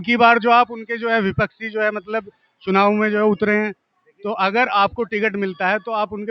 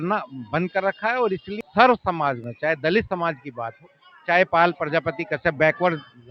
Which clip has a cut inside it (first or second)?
second